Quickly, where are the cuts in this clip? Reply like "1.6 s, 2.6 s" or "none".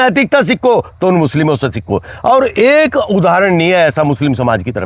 none